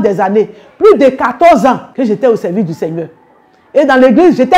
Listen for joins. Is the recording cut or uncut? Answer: cut